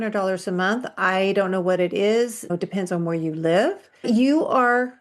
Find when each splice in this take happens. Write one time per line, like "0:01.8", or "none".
0:02.5
0:04.0